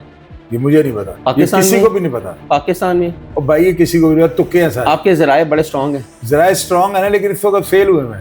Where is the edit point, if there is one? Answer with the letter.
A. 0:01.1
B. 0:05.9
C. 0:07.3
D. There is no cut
A